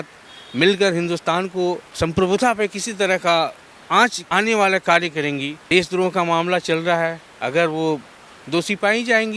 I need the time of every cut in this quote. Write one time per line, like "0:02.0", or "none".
0:01.9
0:04.2
0:05.6

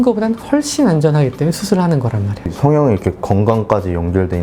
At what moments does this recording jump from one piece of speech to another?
0:02.3

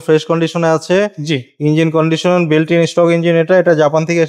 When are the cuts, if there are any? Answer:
none

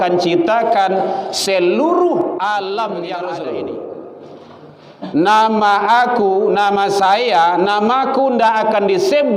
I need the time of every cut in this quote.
0:03.2

